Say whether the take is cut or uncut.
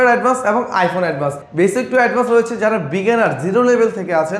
uncut